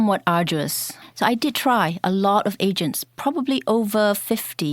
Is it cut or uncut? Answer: cut